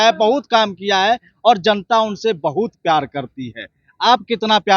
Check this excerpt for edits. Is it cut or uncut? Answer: uncut